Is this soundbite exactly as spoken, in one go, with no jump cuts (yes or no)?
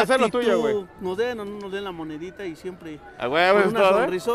no